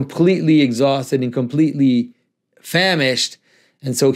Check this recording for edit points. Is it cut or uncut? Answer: uncut